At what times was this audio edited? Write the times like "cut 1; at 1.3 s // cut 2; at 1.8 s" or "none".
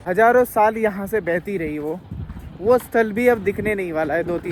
none